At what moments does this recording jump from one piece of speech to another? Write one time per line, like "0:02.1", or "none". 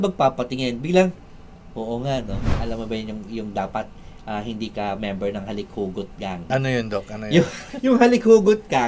0:02.6
0:06.5
0:07.6